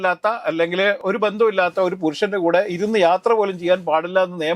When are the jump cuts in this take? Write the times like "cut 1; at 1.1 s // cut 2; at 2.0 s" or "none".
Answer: cut 1; at 1.0 s